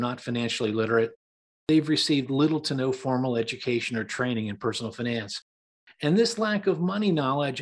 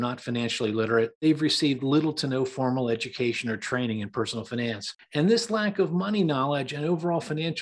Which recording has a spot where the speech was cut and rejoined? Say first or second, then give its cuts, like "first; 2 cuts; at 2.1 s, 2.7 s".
second; 2 cuts; at 1.2 s, 4.9 s